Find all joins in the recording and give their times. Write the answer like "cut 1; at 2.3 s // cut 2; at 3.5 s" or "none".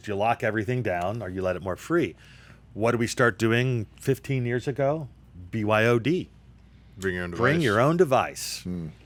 none